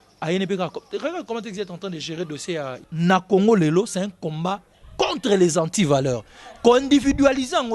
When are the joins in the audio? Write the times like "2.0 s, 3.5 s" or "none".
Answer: 2.8 s